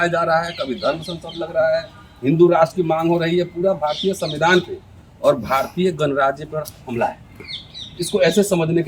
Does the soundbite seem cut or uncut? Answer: uncut